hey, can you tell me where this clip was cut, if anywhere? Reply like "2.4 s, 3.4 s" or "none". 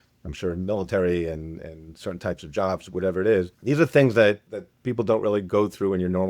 3.5 s